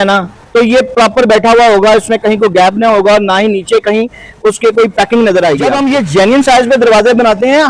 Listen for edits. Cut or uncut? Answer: cut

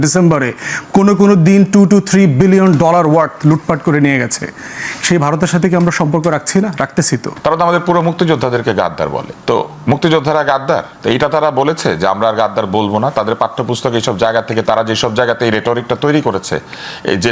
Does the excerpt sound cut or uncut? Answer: cut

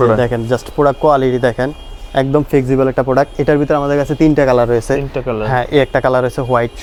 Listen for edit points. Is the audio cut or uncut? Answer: uncut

